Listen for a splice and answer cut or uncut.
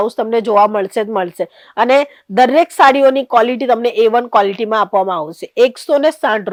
uncut